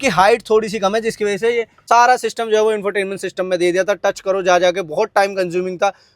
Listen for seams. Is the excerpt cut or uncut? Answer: cut